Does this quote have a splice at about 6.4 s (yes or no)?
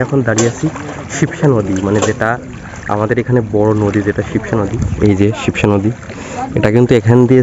no